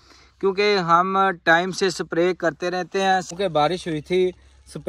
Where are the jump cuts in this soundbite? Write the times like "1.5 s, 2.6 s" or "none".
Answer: 3.3 s